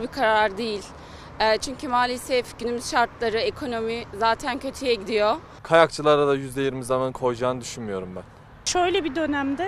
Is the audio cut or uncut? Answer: cut